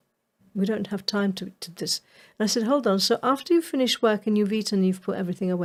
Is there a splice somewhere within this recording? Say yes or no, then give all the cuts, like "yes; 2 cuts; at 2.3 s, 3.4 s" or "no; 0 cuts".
no; 0 cuts